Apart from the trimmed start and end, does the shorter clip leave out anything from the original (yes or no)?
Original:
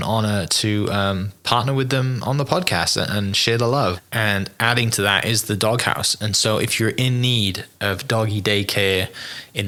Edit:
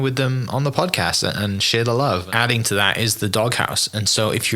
yes